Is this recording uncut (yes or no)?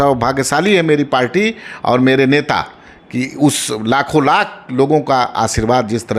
yes